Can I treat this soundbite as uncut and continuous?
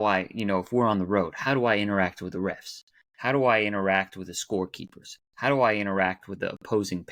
yes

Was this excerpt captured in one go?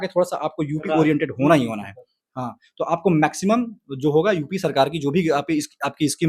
yes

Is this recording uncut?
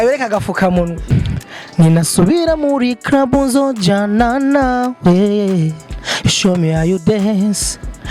no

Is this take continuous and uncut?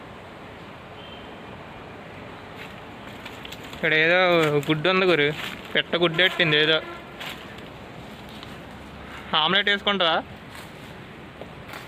yes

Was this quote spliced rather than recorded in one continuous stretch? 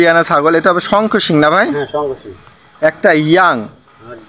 no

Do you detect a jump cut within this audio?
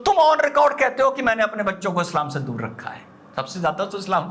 no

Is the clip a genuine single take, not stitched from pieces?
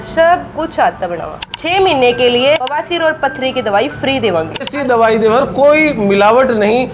no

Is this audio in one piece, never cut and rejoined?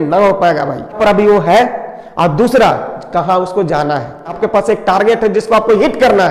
no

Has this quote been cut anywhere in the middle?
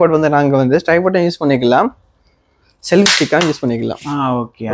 no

